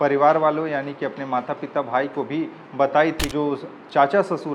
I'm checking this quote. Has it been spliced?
yes; 1 cut; at 3.2 s

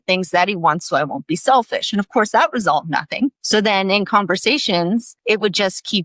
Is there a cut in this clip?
yes; 2 cuts; at 3.4 s, 5.1 s

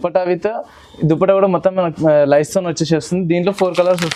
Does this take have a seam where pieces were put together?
no; 0 cuts

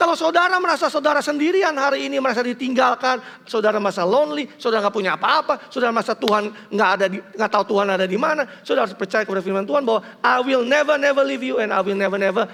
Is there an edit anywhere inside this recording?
no; 0 cuts

